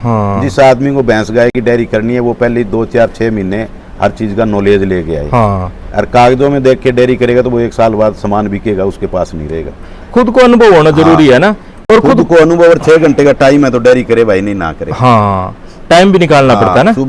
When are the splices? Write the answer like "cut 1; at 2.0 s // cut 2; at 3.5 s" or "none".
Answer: none